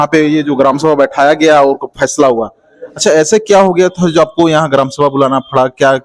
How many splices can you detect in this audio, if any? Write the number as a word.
zero